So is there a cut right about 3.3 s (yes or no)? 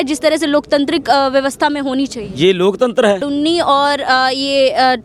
yes